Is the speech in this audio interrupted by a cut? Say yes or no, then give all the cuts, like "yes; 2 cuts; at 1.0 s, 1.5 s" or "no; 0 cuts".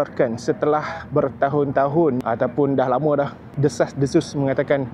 no; 0 cuts